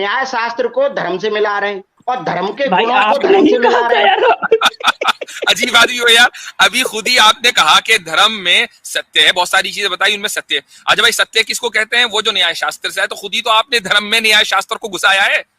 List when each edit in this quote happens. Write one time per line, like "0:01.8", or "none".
0:01.9